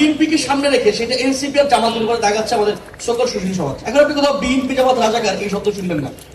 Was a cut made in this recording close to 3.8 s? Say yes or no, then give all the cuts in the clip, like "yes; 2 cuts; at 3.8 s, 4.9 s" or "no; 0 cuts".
yes; 1 cut; at 3.8 s